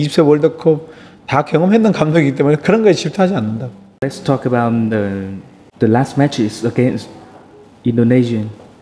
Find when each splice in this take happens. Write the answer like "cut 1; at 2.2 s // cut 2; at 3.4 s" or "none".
cut 1; at 4.2 s